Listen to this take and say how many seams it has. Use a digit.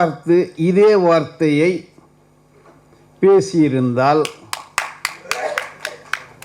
0